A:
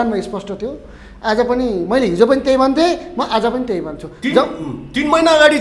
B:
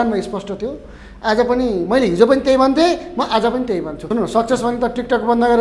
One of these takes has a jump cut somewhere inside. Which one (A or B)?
B